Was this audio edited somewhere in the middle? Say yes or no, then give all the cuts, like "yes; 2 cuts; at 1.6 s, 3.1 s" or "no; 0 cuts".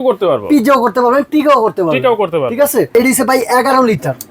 yes; 1 cut; at 2.9 s